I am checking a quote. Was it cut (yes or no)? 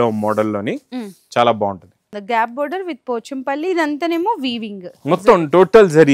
yes